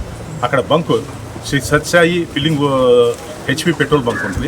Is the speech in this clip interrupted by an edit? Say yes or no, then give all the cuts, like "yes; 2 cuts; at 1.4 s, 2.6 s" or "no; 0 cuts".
yes; 1 cut; at 3.3 s